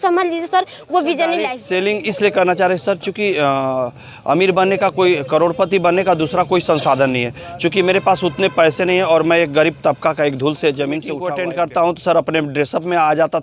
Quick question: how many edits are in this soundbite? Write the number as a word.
two